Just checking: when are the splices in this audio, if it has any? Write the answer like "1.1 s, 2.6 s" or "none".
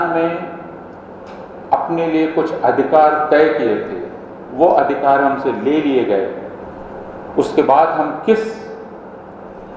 none